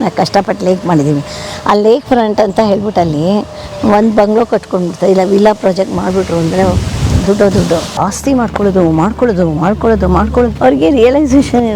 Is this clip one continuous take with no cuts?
no; 2 cuts; at 7.9 s, 10.5 s

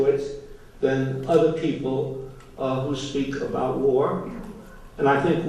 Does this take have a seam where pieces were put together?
no; 0 cuts

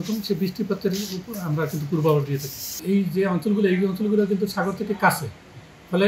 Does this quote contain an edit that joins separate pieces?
yes; 1 cut; at 2.8 s

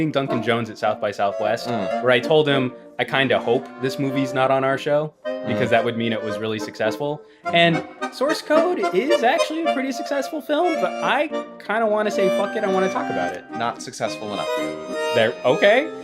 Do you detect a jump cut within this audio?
no; 0 cuts

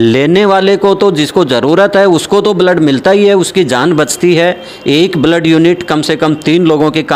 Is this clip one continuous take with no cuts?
yes; 0 cuts

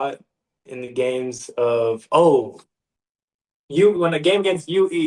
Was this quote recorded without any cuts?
yes; 0 cuts

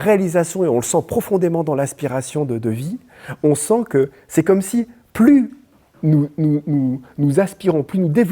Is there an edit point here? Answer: no; 0 cuts

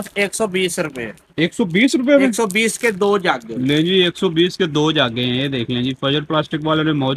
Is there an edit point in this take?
no; 0 cuts

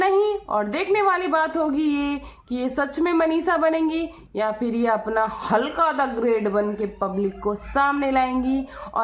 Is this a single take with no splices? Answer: yes; 0 cuts

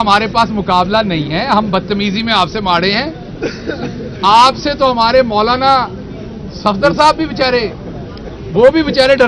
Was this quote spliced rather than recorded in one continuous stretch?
no; 0 cuts

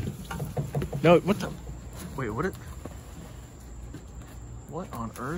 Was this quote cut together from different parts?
no; 0 cuts

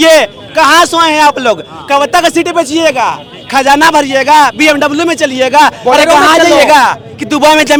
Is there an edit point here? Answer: no; 0 cuts

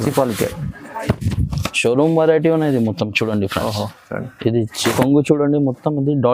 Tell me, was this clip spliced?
yes; 1 cut; at 4.9 s

